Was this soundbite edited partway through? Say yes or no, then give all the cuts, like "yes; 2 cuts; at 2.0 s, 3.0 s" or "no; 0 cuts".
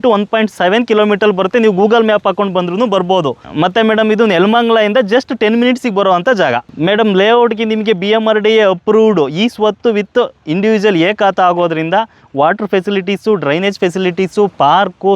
yes; 2 cuts; at 3.5 s, 6.7 s